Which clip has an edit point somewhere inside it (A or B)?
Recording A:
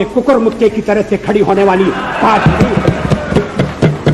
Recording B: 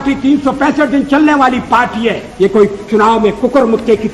B